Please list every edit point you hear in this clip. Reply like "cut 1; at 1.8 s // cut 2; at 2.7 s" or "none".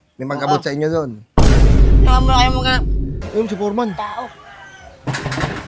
cut 1; at 3.2 s